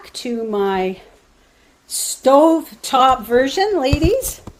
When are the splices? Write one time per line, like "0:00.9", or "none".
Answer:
none